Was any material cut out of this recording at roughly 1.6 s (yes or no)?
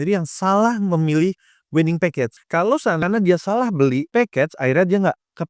no